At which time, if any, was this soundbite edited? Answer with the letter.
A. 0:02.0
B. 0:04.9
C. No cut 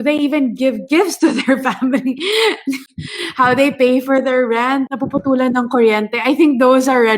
B